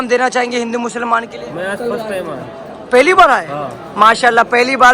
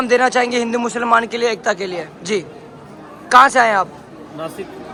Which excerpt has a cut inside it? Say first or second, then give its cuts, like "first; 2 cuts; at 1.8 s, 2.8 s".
first; 1 cut; at 1.3 s